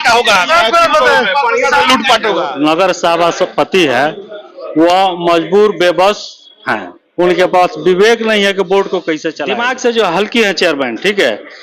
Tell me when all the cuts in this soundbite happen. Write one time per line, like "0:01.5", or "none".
0:02.5
0:09.4